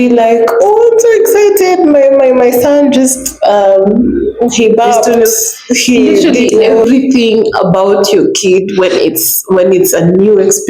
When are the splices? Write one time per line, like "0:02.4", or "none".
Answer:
0:06.8